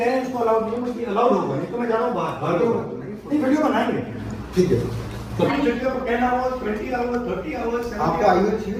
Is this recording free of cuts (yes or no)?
yes